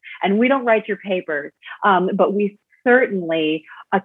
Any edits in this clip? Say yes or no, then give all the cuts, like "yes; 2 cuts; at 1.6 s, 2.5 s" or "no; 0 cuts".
no; 0 cuts